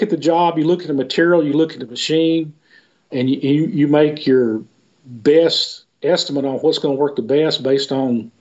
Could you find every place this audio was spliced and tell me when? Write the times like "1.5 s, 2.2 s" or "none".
3.1 s